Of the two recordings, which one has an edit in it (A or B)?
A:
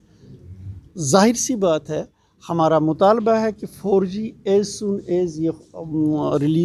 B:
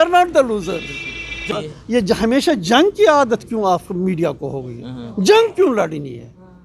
B